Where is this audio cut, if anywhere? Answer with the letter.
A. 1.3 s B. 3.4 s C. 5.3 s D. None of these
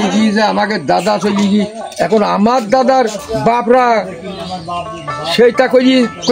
D